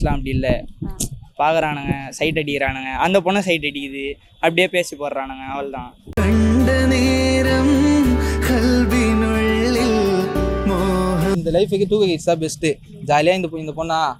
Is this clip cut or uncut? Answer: uncut